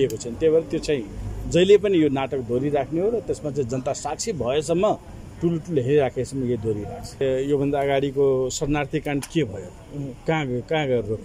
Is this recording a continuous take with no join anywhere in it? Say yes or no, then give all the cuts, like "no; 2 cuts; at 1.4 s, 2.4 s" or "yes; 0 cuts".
no; 1 cut; at 7.2 s